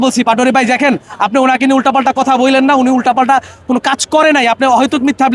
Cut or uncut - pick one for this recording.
uncut